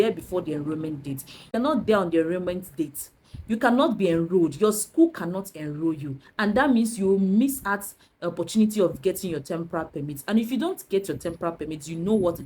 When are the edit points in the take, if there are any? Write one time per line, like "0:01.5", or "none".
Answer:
0:01.5

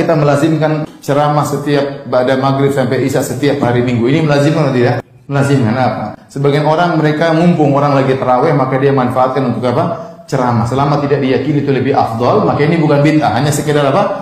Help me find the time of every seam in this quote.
none

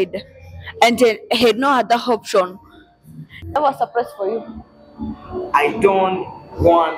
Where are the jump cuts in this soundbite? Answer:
0:03.5

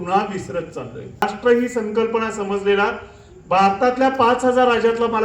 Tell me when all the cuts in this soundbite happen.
0:01.3

